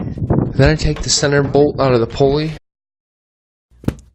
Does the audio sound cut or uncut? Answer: uncut